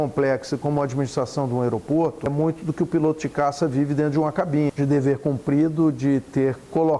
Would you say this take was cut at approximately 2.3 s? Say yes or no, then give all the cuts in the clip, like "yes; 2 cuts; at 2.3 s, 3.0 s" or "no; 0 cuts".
yes; 2 cuts; at 2.3 s, 4.7 s